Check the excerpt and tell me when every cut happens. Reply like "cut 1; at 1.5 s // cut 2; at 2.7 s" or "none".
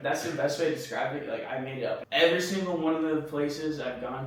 cut 1; at 2.0 s